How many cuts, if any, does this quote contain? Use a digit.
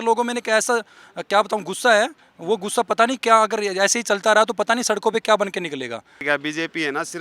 1